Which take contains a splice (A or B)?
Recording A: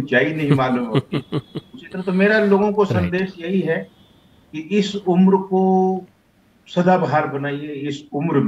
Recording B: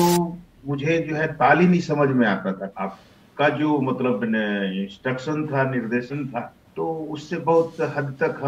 B